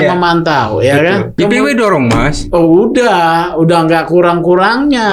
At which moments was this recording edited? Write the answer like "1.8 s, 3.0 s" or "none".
1.3 s